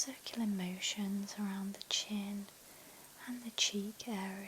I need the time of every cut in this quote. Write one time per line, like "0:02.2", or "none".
none